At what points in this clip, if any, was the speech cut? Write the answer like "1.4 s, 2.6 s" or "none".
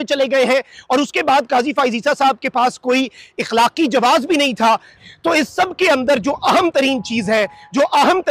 4.9 s

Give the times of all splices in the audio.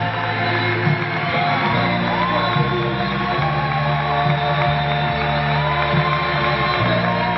2.9 s

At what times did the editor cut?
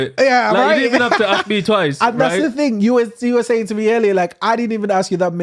none

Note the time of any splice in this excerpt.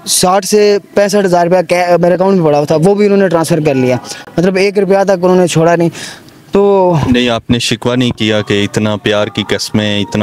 none

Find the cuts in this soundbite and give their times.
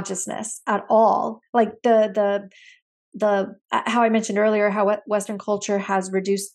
none

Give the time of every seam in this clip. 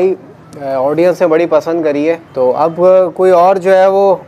2.3 s

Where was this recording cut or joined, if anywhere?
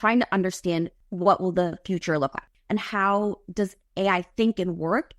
1.0 s, 2.5 s

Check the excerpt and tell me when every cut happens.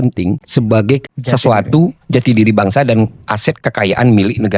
none

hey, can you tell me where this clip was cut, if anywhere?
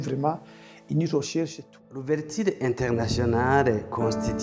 1.6 s

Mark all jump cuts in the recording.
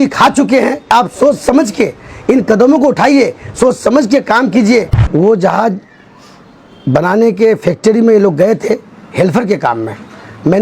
0.9 s, 5.0 s

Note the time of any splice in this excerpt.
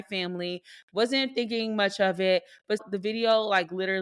2.8 s

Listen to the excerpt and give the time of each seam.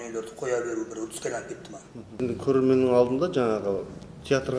2.2 s

